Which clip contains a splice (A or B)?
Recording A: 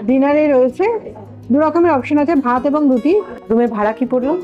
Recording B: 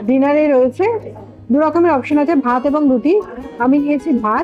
A